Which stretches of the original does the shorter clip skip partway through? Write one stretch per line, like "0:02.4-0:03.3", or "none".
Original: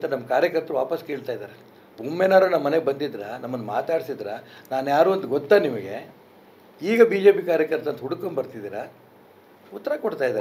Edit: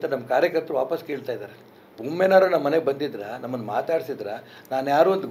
none